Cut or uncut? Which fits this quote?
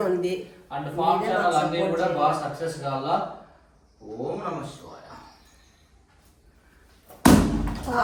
uncut